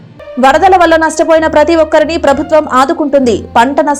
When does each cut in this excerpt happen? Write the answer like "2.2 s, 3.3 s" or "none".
none